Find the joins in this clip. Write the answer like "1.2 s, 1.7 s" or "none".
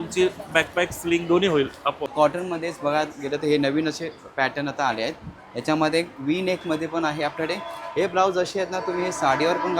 2.1 s